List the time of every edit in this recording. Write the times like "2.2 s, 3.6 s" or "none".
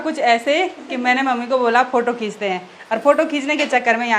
none